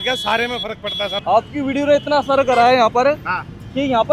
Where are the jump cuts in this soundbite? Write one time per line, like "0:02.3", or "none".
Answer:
0:01.1